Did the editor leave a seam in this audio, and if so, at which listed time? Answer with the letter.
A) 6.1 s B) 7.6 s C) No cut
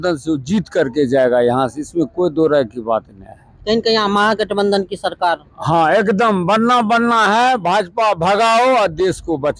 C